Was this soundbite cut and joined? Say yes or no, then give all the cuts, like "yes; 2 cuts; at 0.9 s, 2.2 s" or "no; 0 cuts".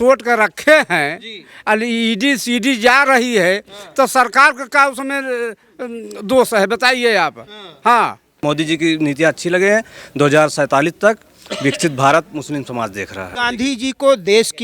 yes; 2 cuts; at 8.4 s, 13.4 s